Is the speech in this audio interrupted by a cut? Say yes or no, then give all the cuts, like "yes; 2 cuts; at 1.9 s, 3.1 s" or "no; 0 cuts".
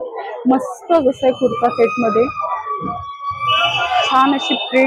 no; 0 cuts